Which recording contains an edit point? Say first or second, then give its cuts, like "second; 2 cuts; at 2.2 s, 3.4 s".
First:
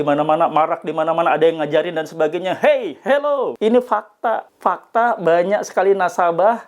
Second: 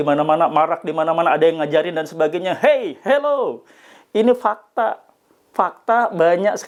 first; 2 cuts; at 3.5 s, 4.5 s